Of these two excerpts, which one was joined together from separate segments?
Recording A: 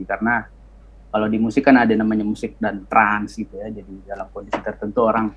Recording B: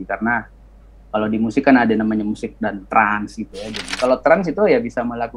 B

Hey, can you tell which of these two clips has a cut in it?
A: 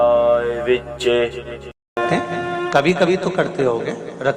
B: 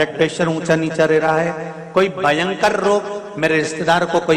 A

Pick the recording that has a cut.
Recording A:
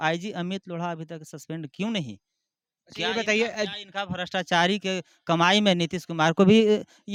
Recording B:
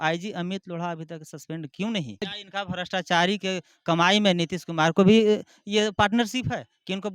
B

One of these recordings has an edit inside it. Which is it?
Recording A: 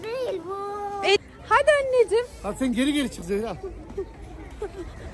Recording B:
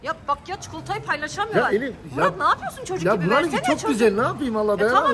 A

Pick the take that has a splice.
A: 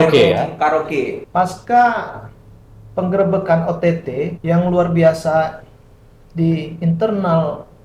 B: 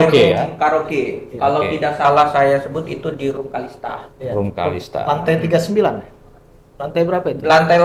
A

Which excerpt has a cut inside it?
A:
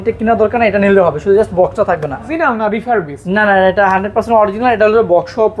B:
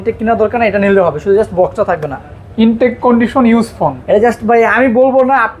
A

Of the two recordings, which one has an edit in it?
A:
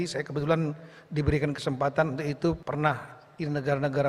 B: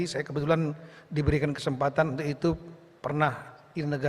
A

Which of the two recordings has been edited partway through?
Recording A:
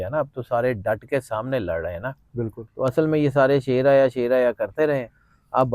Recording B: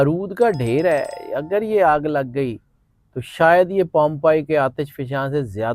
A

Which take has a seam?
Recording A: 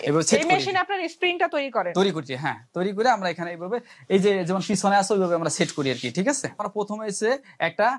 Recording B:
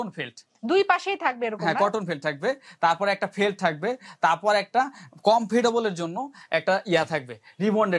A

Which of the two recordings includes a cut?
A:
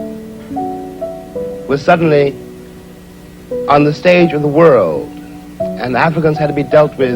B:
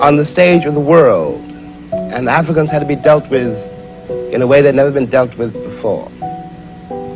A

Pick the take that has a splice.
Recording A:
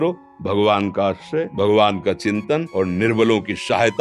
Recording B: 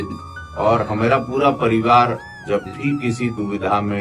A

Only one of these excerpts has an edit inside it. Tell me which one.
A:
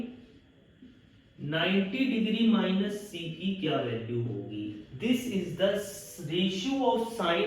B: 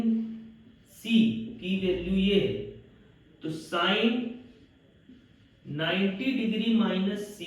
A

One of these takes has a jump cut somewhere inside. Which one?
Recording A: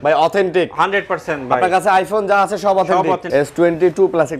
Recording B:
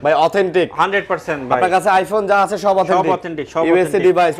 A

